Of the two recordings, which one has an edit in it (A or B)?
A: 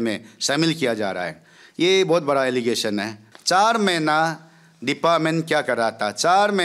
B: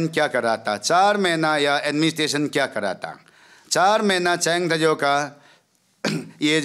A